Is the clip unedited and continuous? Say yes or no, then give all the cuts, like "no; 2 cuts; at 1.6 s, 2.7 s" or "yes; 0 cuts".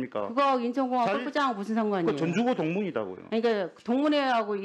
yes; 0 cuts